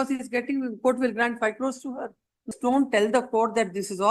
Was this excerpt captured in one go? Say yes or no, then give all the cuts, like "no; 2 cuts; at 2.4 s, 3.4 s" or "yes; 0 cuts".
no; 1 cut; at 2.5 s